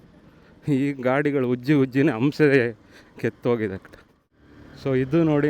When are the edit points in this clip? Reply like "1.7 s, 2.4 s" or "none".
4.6 s